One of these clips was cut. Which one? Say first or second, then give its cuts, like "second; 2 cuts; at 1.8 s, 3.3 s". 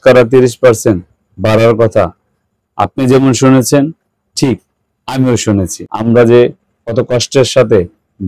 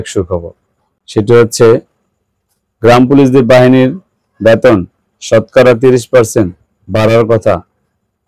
first; 1 cut; at 5.8 s